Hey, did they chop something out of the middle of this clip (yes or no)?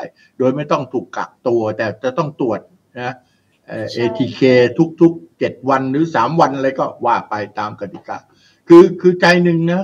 no